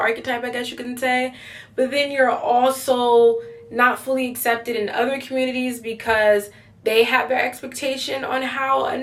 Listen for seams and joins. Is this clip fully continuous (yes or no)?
yes